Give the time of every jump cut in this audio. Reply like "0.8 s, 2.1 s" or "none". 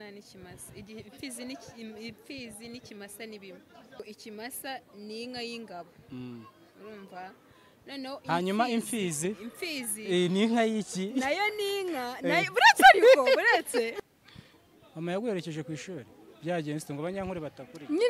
4.0 s, 14.0 s